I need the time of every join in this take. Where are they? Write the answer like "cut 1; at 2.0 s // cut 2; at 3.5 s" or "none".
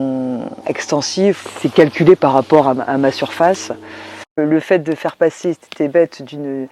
cut 1; at 1.4 s